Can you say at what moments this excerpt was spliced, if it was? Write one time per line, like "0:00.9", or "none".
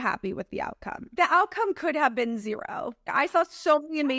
0:01.1
0:03.1